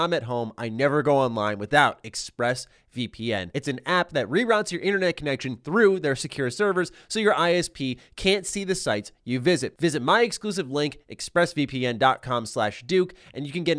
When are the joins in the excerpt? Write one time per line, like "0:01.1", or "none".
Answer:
0:03.5
0:09.7

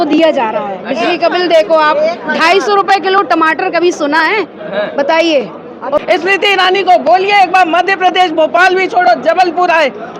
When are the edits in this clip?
0:06.0

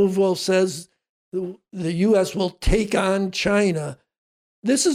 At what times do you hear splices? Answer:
none

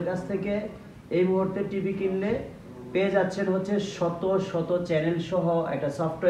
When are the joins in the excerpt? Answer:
none

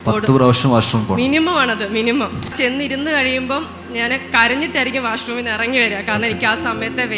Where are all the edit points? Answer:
0:02.5

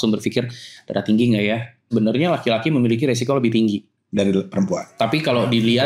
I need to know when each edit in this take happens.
0:01.8

